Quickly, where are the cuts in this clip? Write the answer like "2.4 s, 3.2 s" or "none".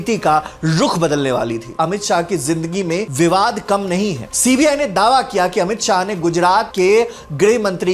1.7 s, 4.3 s